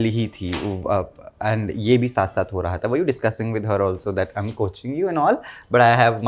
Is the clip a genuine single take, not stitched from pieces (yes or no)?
yes